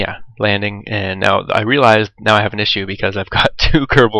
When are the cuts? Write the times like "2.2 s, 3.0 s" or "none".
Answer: 1.0 s